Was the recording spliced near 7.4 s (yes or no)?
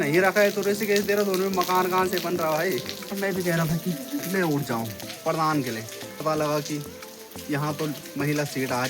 no